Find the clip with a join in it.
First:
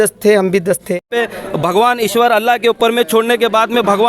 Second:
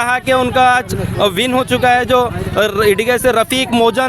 first; 1 cut; at 1.1 s

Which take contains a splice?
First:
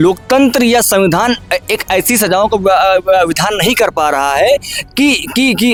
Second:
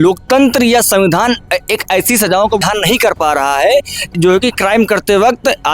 second; 2 cuts; at 2.6 s, 4.1 s

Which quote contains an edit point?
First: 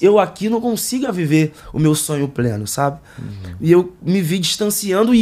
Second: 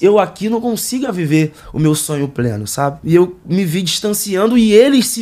second; 1 cut; at 3.0 s

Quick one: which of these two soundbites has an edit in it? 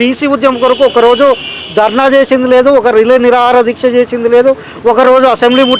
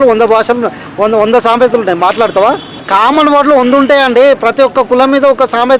second; 1 cut; at 2.7 s

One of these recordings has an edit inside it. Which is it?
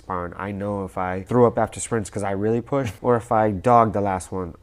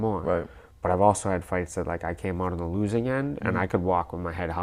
first; 2 cuts; at 1.2 s, 2.9 s

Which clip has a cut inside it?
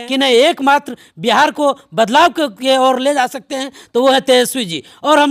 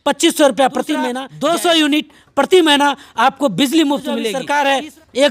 second; 2 cuts; at 1.2 s, 4.4 s

